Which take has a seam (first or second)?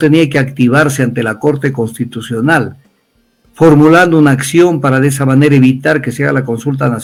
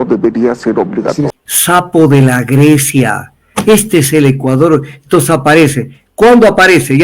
second